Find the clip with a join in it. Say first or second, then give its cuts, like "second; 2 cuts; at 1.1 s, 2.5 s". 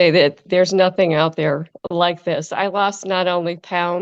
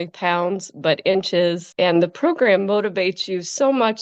second; 1 cut; at 1.7 s